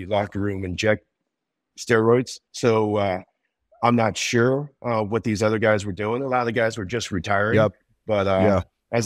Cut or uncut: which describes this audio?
cut